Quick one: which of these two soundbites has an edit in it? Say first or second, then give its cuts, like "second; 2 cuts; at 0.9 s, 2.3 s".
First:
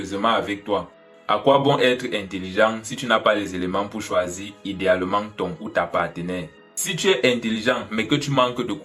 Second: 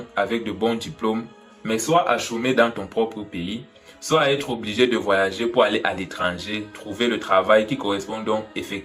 first; 2 cuts; at 1.1 s, 6.7 s